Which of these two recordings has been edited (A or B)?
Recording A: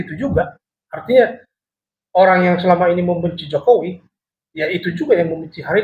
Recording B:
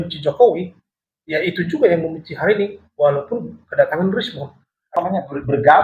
B